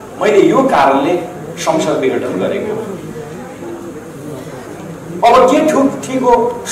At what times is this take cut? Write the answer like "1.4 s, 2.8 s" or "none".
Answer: none